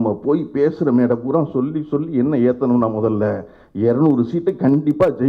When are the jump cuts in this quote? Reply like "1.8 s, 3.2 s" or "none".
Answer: none